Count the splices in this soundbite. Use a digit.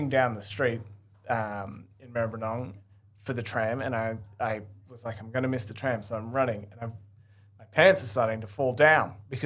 0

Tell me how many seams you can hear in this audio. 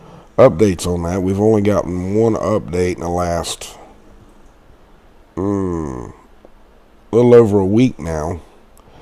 0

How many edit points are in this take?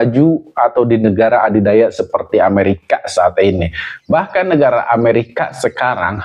0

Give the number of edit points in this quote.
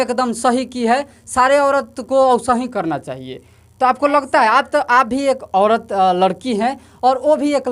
0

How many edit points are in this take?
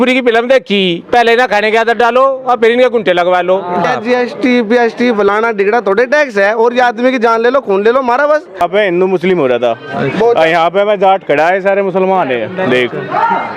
2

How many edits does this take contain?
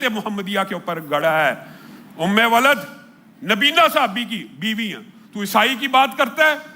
0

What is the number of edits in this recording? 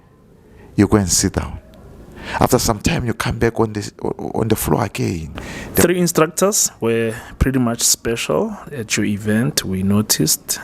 1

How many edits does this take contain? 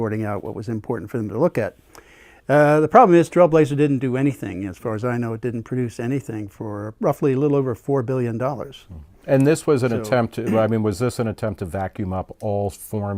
1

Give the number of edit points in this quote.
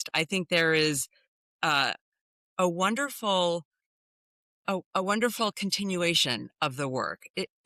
0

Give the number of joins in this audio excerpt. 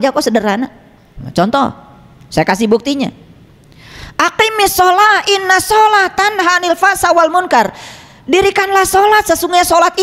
1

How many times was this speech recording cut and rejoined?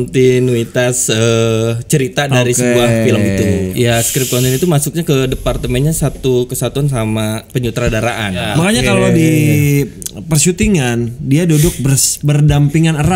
2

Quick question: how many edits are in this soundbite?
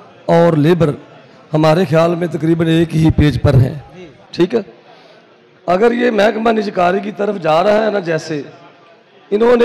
0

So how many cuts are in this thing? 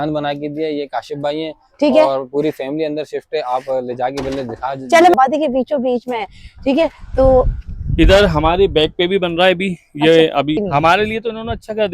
2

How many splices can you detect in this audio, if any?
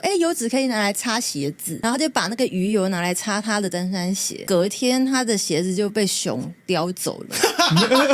0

